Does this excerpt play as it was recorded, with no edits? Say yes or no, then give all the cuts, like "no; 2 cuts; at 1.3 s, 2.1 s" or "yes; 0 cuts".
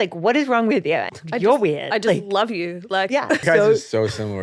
no; 2 cuts; at 1.1 s, 3.4 s